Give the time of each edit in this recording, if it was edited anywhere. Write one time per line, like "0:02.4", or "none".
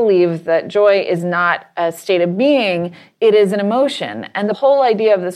0:04.4